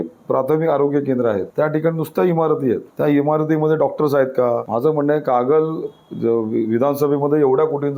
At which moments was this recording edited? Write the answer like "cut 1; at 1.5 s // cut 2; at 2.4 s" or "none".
cut 1; at 1.5 s // cut 2; at 2.9 s // cut 3; at 4.7 s